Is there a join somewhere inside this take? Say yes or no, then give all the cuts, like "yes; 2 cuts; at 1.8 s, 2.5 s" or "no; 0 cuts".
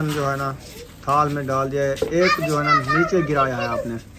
no; 0 cuts